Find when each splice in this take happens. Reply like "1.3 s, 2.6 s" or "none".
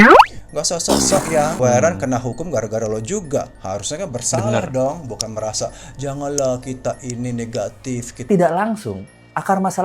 1.6 s, 8.3 s